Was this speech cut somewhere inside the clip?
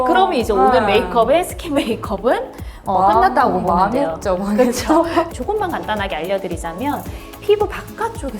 yes; 1 cut; at 5.3 s

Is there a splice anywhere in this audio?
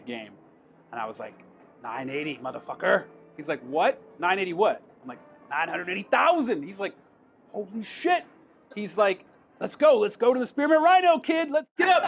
no; 0 cuts

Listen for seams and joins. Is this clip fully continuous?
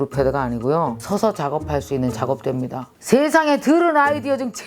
no; 2 cuts; at 1.0 s, 2.9 s

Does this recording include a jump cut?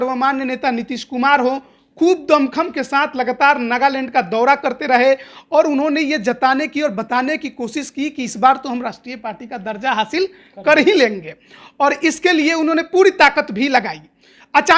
no; 0 cuts

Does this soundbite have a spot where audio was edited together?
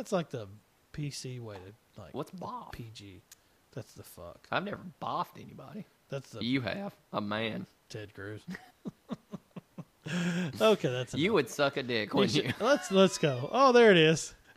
no; 0 cuts

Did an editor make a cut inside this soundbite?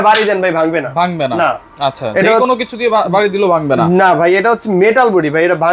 no; 0 cuts

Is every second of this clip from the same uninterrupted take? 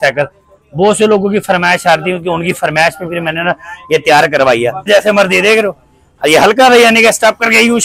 no; 1 cut; at 4.9 s

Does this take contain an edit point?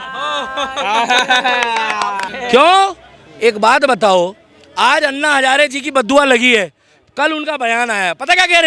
no; 0 cuts

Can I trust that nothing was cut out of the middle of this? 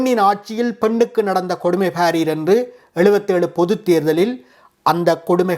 yes; 0 cuts

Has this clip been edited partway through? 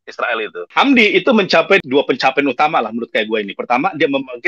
no; 0 cuts

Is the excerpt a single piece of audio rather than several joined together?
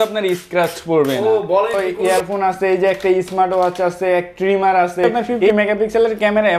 no; 2 cuts; at 1.7 s, 5.3 s

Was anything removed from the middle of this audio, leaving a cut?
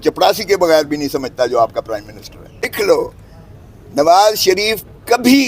yes; 1 cut; at 2.7 s

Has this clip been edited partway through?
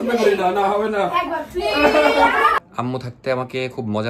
yes; 1 cut; at 2.6 s

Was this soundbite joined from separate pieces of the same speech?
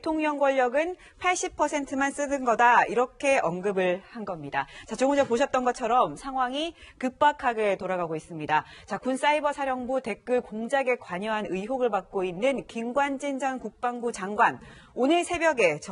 no; 0 cuts

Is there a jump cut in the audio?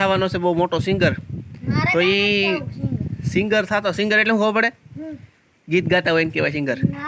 no; 0 cuts

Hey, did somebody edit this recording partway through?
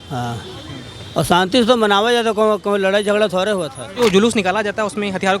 yes; 1 cut; at 4.0 s

